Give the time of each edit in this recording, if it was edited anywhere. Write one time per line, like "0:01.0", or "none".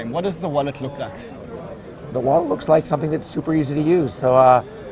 none